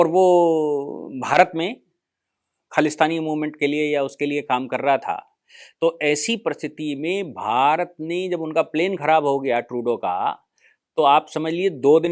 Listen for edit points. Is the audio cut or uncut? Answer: uncut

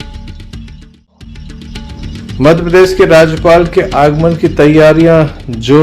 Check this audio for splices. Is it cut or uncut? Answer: cut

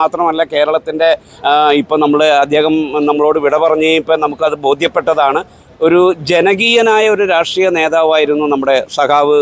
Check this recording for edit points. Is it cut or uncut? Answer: uncut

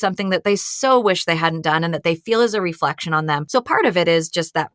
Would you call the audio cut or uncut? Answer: cut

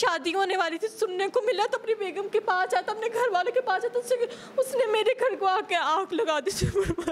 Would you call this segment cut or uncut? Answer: uncut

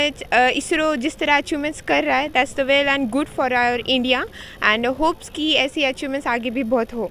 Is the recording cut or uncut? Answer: uncut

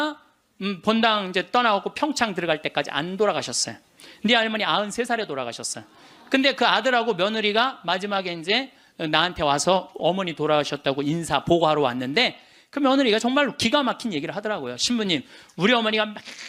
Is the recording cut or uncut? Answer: uncut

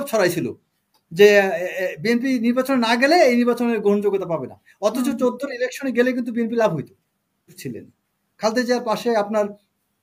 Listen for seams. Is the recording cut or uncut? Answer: cut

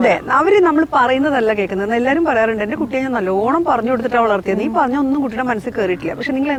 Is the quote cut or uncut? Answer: uncut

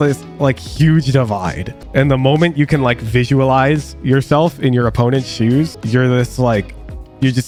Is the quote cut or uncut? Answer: uncut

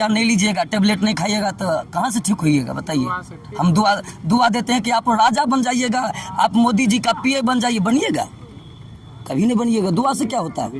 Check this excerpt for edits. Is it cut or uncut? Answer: uncut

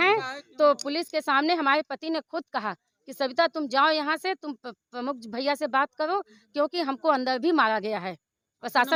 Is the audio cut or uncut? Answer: uncut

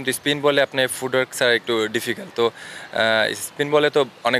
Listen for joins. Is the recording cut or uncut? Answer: uncut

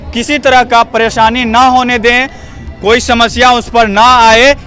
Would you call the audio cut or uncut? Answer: uncut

